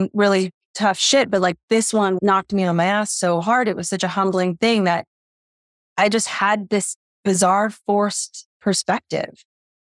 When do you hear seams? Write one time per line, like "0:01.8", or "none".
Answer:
0:02.2